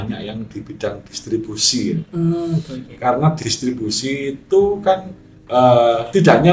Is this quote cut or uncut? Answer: uncut